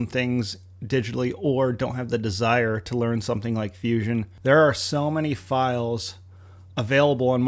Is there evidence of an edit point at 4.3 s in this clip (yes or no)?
yes